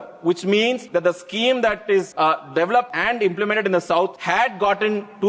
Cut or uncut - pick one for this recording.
cut